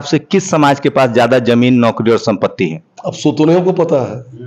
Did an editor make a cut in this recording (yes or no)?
no